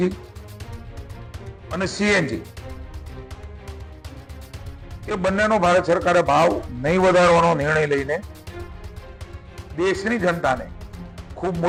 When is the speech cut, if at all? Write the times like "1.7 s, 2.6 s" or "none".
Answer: none